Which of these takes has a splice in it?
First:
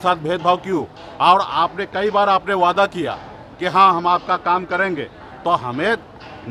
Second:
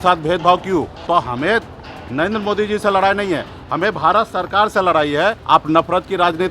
second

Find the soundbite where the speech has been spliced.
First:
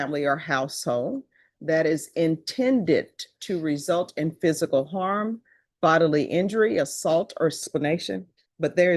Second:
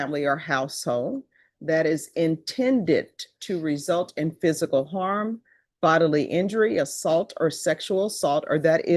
first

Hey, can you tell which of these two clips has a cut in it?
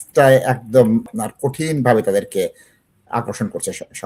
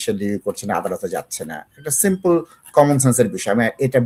first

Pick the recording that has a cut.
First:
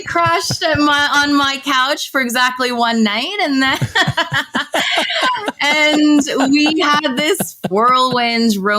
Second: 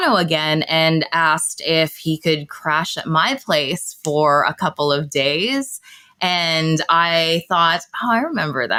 first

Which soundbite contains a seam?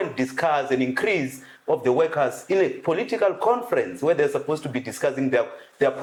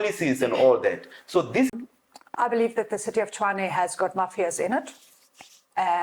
second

